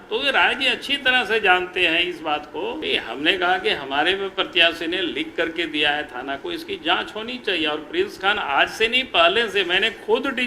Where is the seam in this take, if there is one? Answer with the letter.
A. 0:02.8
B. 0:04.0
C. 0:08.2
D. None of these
A